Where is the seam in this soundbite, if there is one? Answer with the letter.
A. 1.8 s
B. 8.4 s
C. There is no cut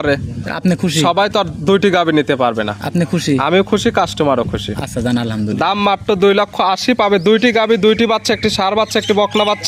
C